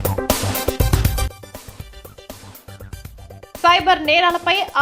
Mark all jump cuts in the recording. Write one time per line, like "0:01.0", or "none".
0:01.3
0:02.5